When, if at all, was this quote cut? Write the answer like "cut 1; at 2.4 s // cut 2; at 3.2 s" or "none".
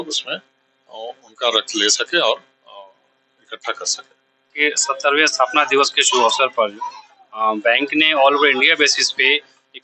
cut 1; at 4.5 s